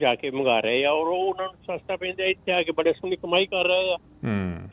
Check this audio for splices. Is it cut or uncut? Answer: uncut